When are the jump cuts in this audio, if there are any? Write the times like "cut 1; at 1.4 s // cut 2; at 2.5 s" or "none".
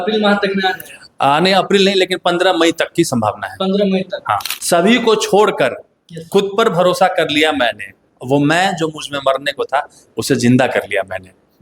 cut 1; at 4.5 s